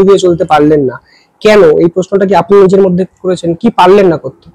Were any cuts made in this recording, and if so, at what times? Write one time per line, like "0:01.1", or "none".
none